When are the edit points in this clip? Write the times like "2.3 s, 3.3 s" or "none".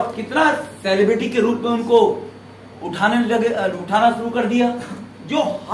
none